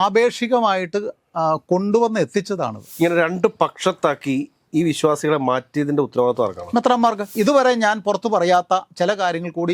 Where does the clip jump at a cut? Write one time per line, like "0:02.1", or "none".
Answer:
0:02.9
0:07.3